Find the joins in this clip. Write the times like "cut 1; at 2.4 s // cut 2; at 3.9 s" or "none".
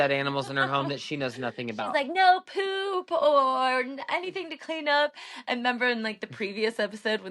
none